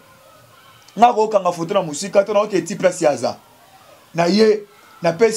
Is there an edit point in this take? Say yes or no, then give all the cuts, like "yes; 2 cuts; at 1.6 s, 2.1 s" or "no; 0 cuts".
no; 0 cuts